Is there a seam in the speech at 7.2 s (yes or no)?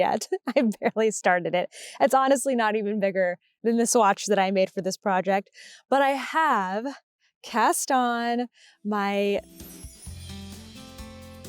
no